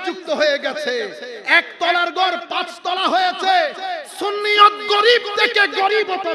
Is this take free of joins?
yes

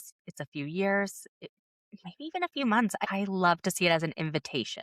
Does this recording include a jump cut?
yes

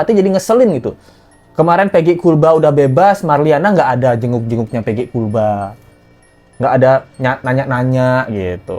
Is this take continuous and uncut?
yes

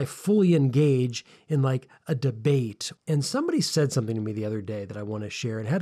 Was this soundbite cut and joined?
yes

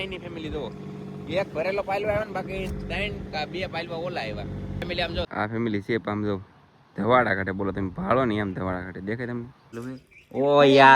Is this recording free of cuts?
no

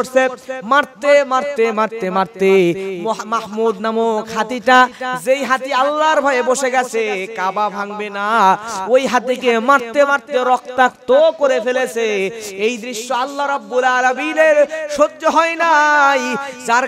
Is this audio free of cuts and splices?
yes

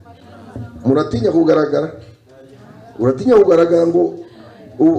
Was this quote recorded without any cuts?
yes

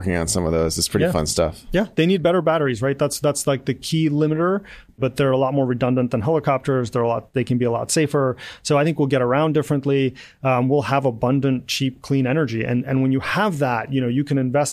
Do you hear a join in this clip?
yes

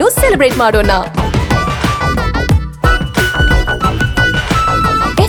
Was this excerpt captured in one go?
yes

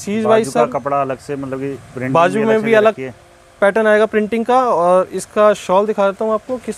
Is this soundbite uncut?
yes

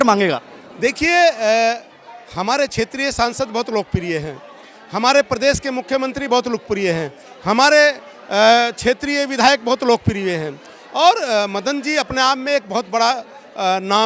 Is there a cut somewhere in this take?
no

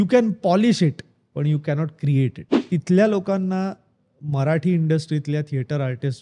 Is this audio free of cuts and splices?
no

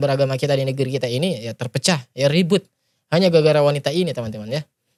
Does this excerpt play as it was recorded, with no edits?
yes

